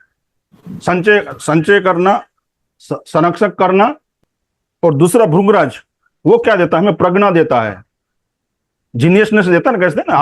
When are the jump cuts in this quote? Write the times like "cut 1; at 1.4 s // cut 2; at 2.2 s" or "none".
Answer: cut 1; at 4.1 s